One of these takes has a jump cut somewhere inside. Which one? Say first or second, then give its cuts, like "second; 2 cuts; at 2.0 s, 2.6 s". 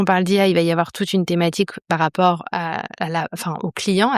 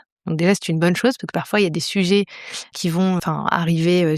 second; 1 cut; at 2.7 s